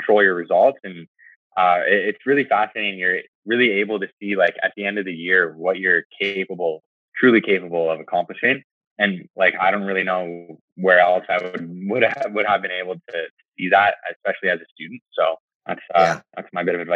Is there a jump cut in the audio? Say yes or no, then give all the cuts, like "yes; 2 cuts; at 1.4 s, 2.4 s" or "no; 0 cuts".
yes; 1 cut; at 15.5 s